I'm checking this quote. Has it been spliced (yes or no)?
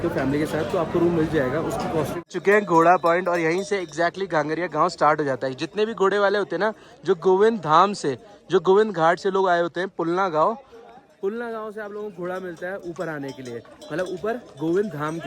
yes